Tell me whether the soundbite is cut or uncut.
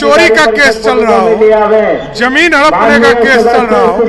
uncut